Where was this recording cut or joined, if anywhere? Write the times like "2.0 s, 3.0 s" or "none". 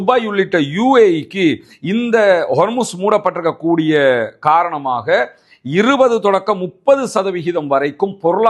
none